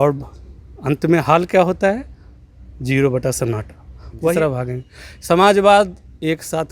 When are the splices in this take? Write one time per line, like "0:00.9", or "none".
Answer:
0:04.3

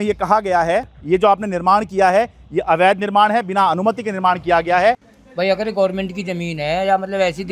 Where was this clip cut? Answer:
0:01.0
0:05.1

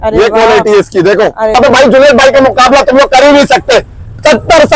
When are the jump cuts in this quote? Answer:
0:01.5

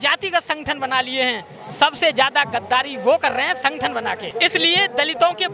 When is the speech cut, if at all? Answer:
0:04.3

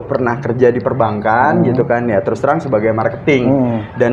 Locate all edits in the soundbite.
none

